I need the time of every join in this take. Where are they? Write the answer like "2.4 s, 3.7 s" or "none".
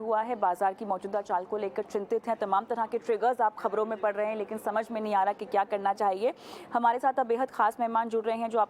4.4 s